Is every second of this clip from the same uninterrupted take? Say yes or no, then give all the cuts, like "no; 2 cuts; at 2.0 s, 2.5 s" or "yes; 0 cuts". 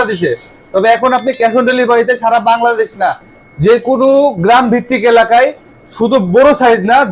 yes; 0 cuts